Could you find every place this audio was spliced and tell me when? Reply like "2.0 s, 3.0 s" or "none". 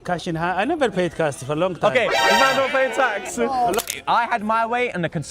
3.8 s